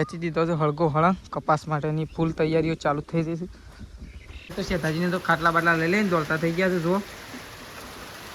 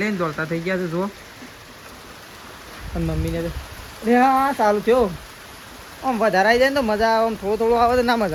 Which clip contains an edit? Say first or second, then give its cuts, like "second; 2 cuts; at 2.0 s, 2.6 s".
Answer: first; 1 cut; at 4.5 s